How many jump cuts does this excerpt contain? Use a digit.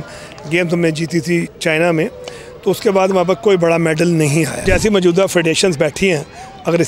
1